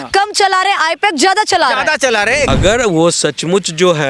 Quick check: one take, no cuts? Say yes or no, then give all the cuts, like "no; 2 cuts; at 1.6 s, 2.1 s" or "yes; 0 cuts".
no; 1 cut; at 2.5 s